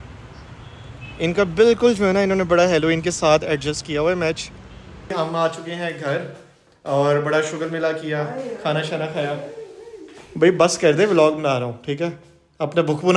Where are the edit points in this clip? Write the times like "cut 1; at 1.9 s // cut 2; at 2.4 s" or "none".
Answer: cut 1; at 5.1 s